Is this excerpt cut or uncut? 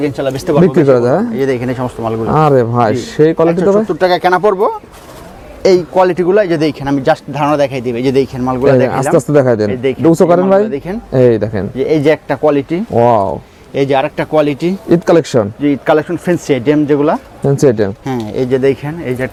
uncut